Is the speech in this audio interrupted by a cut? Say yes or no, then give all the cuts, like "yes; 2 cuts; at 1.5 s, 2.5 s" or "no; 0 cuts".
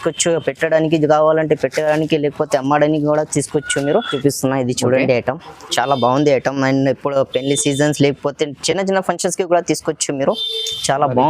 yes; 1 cut; at 4.1 s